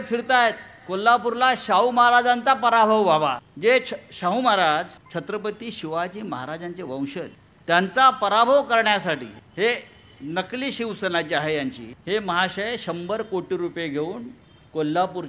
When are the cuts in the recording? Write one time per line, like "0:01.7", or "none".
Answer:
0:03.5
0:05.0
0:07.4
0:09.4
0:11.9